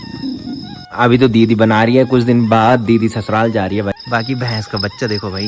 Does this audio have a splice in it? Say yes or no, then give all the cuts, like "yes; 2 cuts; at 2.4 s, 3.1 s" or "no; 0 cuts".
yes; 2 cuts; at 0.9 s, 4.0 s